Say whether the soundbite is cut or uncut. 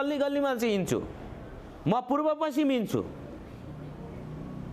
uncut